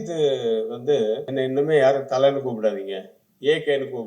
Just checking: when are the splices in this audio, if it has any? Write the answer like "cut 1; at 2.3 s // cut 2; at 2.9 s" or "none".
cut 1; at 1.3 s